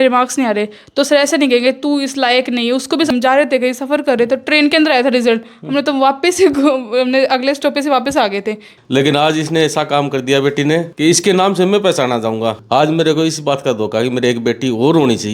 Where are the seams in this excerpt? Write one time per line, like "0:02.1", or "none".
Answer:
0:03.1
0:08.7
0:10.9
0:12.6